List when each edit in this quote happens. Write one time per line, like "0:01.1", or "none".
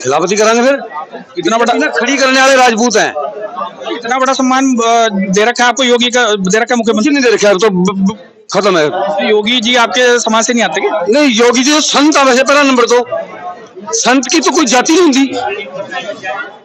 none